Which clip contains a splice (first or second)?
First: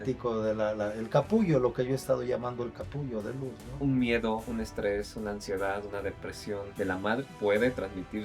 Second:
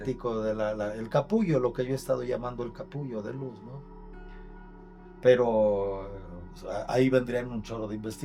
first